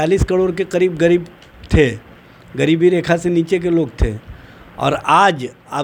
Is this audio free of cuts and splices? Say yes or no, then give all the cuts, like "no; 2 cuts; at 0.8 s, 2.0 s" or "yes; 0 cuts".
yes; 0 cuts